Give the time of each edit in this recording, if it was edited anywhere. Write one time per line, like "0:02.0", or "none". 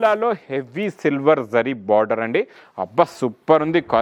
none